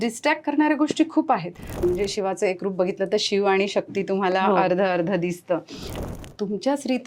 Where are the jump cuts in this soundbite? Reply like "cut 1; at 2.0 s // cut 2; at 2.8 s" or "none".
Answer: cut 1; at 1.8 s // cut 2; at 5.9 s